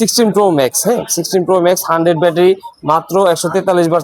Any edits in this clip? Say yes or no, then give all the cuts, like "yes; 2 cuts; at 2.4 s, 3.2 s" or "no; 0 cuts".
no; 0 cuts